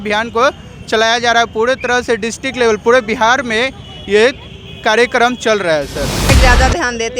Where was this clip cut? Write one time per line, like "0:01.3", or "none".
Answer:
0:06.3